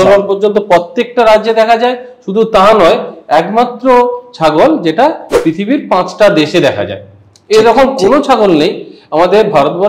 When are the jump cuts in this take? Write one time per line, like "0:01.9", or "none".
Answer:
none